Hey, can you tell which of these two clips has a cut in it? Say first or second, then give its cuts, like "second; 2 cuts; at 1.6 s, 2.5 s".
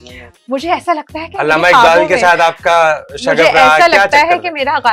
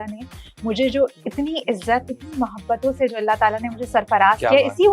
second; 1 cut; at 2.2 s